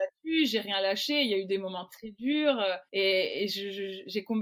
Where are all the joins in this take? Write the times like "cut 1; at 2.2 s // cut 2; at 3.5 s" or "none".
cut 1; at 2.8 s